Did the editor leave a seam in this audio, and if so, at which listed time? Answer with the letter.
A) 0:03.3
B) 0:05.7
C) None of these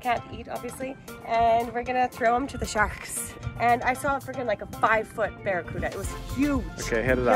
A